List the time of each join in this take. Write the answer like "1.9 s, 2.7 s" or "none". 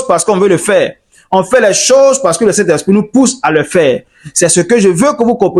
none

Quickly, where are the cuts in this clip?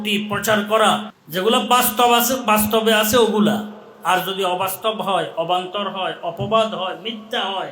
1.2 s

